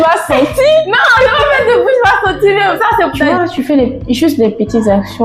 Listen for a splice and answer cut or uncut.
cut